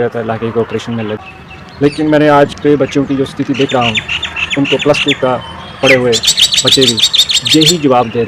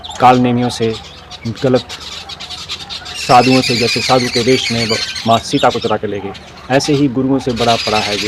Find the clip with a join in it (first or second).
first